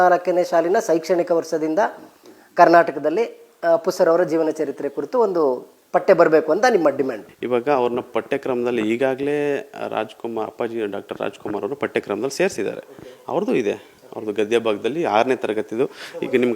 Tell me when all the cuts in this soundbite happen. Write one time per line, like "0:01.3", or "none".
none